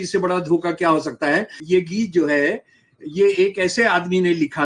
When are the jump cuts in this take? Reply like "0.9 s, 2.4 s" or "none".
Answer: 1.5 s